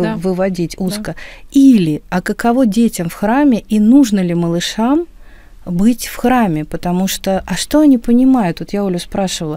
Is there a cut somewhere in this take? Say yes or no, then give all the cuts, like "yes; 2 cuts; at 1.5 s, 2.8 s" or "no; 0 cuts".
no; 0 cuts